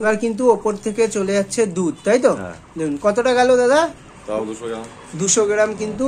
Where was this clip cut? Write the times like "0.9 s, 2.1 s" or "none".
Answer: none